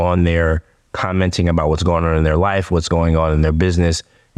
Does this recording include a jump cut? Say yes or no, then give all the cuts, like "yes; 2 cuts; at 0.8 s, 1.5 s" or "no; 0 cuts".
no; 0 cuts